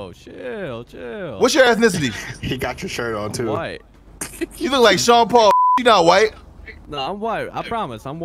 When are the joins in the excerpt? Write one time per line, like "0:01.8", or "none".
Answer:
none